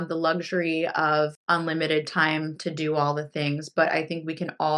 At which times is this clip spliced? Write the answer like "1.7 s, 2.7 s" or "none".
1.4 s